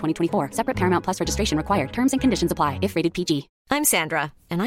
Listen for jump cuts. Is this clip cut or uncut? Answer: cut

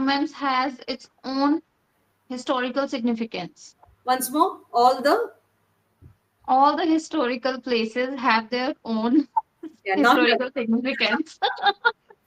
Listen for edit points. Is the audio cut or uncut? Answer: uncut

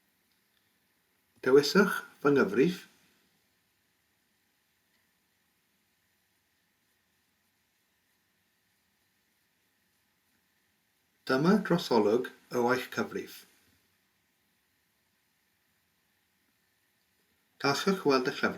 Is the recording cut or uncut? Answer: uncut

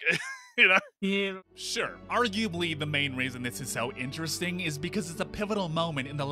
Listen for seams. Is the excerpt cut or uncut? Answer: cut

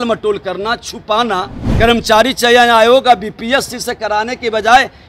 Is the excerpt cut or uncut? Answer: cut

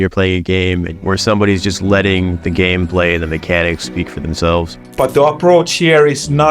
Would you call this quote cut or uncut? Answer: cut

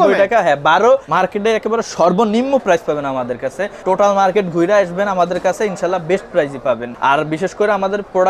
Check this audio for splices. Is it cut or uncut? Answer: cut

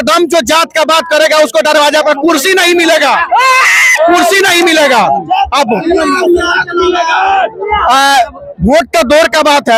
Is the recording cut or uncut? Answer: uncut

